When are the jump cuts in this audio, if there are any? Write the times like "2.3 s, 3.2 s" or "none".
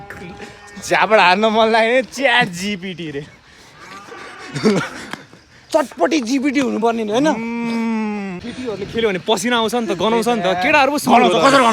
8.4 s